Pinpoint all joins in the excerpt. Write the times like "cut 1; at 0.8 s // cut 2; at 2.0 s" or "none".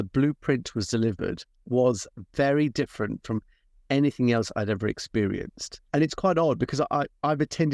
cut 1; at 1.5 s // cut 2; at 5.7 s